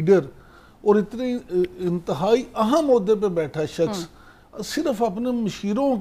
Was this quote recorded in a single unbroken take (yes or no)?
yes